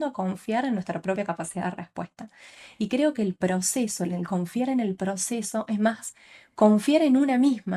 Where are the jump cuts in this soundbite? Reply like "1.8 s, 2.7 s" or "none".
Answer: none